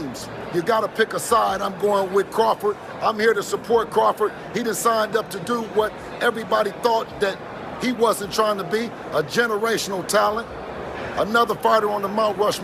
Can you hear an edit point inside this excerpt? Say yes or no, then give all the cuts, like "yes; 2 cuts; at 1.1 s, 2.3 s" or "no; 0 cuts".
no; 0 cuts